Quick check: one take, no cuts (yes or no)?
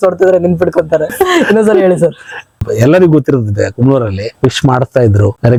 yes